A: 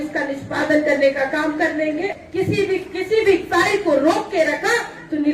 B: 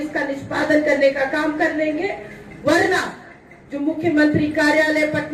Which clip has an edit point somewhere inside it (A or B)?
A